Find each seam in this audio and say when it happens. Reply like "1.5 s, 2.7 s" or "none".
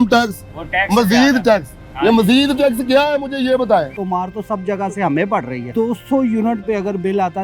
3.9 s, 5.6 s